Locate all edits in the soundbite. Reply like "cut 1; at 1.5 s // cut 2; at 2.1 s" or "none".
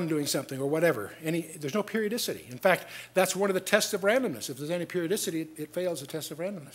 none

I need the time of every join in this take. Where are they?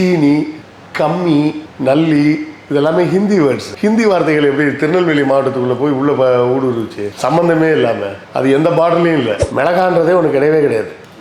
cut 1; at 9.4 s

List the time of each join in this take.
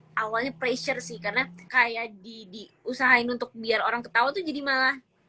cut 1; at 1.6 s

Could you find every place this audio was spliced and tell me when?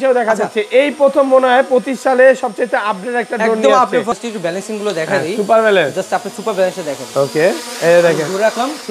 cut 1; at 4.1 s

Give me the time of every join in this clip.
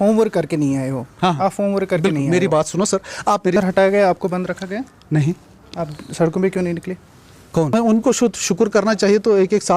cut 1; at 3.5 s // cut 2; at 7.7 s

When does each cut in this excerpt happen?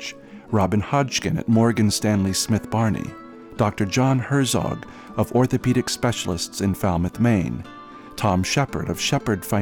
none

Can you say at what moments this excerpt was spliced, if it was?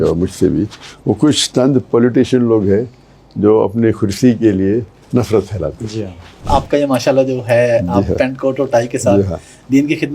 cut 1; at 6.5 s

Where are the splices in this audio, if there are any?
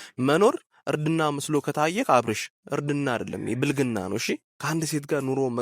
cut 1; at 4.5 s

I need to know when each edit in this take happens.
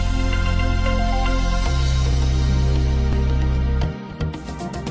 none

